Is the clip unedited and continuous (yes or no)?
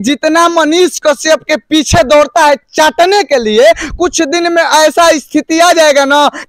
yes